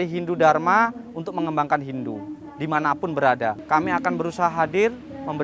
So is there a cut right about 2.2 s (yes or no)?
no